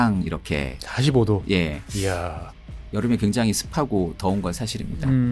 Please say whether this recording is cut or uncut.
uncut